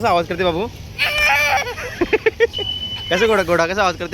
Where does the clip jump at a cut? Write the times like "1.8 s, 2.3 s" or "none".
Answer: 2.4 s

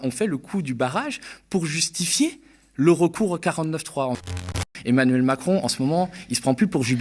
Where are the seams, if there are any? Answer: 4.6 s

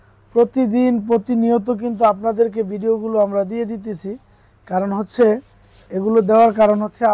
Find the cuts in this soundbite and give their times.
none

